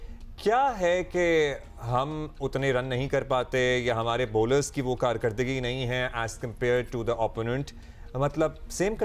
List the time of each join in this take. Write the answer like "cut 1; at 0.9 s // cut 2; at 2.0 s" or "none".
none